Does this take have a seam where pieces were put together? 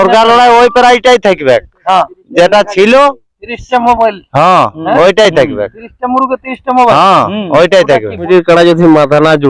yes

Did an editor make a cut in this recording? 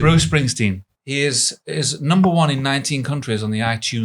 yes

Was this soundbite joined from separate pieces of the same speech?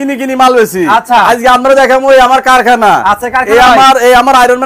no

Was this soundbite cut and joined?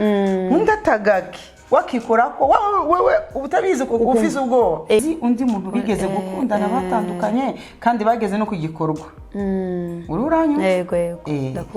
yes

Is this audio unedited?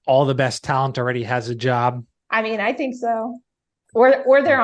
yes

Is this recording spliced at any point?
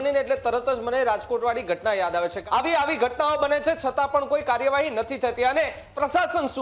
yes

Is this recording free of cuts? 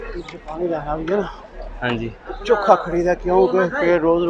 yes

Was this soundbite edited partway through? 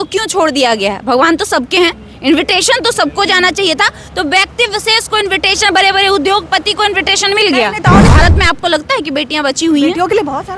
yes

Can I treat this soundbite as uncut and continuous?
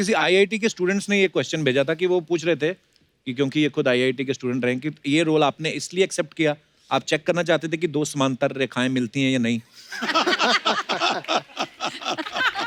yes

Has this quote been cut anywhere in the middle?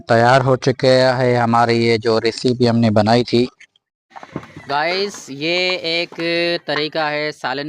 yes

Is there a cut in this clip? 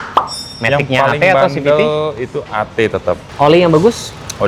yes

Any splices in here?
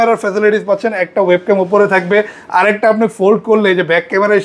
no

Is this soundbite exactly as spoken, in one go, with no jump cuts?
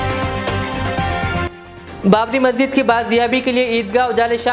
no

